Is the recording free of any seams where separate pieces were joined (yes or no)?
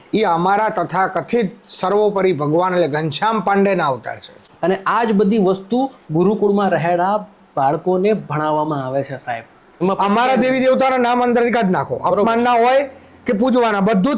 no